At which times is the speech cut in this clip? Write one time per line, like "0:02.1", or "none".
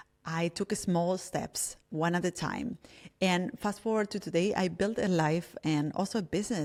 none